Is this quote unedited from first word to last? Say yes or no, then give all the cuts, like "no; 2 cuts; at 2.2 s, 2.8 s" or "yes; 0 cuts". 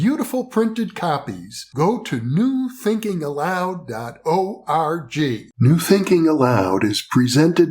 no; 1 cut; at 5.5 s